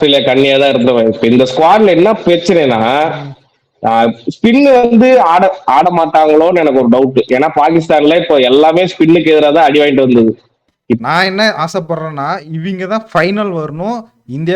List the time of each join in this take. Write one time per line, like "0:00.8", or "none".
0:11.0